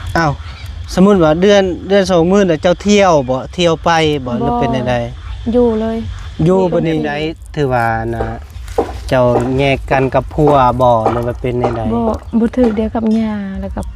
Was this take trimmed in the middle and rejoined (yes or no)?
yes